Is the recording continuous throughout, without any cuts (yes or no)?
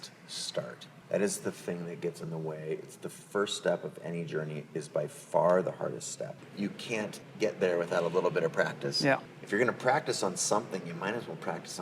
no